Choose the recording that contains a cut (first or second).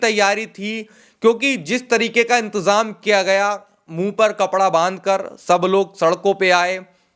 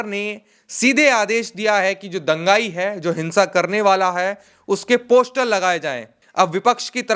second